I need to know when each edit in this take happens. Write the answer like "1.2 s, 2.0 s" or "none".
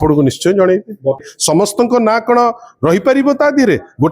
1.3 s